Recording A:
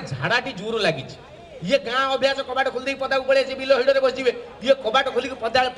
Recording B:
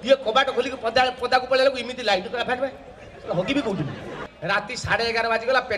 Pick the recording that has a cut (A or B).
B